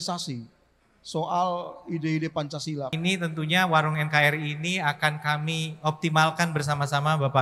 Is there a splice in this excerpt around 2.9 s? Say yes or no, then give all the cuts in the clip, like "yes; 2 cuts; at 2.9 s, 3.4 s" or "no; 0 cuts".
yes; 1 cut; at 2.9 s